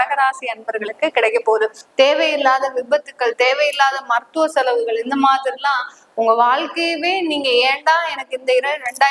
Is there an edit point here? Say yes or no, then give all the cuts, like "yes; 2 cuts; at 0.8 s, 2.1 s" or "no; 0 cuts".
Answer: yes; 1 cut; at 1.8 s